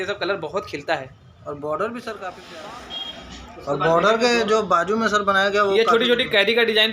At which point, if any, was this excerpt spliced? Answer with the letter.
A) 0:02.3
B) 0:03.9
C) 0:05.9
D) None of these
A